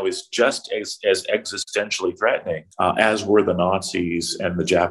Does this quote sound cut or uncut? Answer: cut